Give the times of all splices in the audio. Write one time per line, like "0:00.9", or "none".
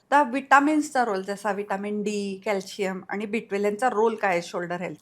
none